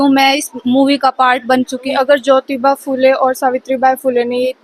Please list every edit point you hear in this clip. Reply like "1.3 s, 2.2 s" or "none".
1.8 s